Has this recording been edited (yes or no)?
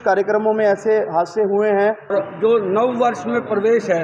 yes